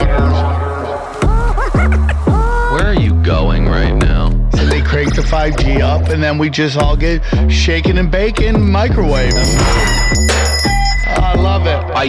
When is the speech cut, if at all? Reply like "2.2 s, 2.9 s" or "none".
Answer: none